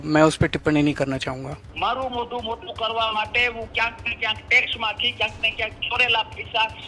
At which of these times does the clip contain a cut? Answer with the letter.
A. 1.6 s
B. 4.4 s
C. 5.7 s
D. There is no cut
A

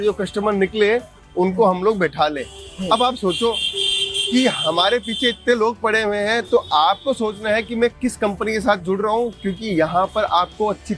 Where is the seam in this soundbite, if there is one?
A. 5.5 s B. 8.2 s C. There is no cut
C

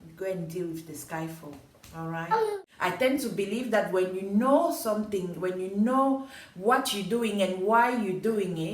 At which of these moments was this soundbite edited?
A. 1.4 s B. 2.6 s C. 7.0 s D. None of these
B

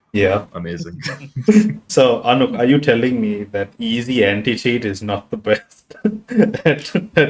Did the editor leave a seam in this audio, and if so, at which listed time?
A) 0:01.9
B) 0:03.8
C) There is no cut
A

